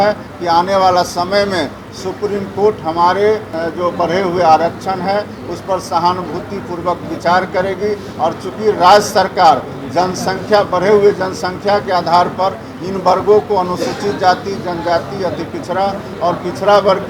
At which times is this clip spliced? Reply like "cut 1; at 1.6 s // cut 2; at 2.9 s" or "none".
none